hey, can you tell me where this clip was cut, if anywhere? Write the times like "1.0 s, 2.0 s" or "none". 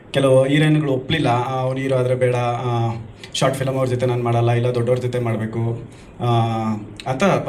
none